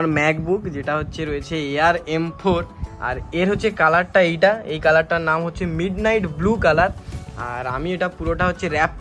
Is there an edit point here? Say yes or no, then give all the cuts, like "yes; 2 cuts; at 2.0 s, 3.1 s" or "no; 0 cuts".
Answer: no; 0 cuts